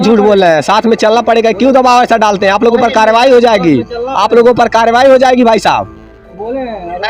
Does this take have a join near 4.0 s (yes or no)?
no